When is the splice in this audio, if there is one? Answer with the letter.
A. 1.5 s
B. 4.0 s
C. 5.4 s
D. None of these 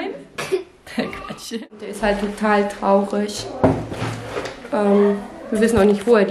A